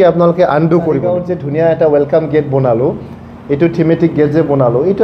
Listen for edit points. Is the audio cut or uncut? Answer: cut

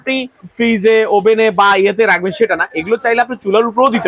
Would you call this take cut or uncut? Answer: uncut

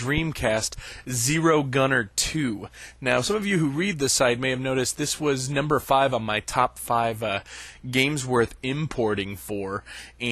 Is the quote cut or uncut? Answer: uncut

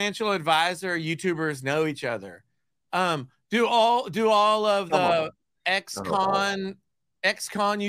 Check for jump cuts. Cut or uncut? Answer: uncut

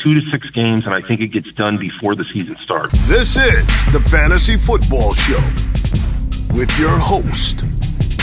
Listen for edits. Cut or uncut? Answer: cut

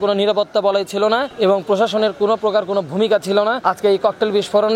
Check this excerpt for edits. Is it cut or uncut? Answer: cut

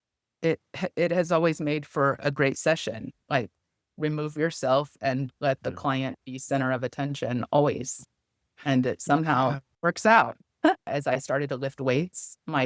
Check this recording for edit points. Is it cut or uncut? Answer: cut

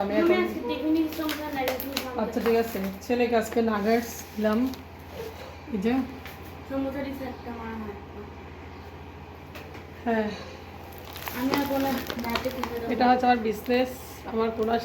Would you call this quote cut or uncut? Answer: uncut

